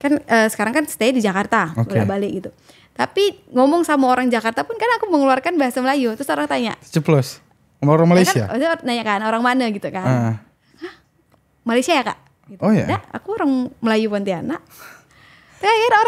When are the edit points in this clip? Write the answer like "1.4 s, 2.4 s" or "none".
none